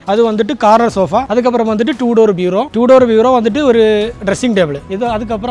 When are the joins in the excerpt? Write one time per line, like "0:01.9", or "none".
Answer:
0:01.3